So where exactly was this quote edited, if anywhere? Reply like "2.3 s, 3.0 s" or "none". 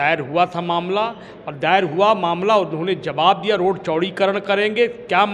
none